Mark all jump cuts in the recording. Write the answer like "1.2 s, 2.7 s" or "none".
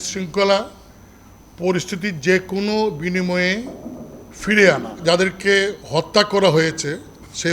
5.0 s